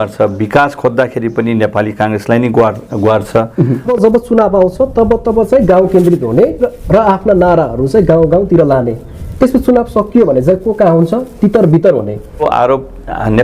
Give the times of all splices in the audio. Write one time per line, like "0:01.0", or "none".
0:03.9
0:12.4